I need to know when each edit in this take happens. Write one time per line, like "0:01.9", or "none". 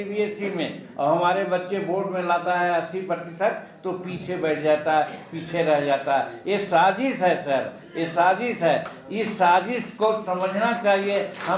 none